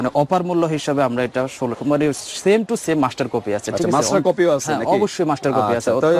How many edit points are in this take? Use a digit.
1